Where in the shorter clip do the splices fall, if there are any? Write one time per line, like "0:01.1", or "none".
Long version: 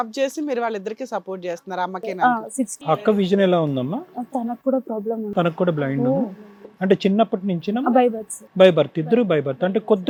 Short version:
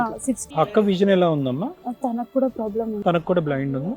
none